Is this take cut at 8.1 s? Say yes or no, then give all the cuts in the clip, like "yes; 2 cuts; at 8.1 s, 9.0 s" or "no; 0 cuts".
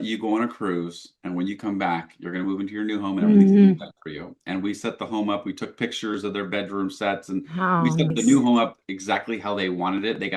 yes; 1 cut; at 8.1 s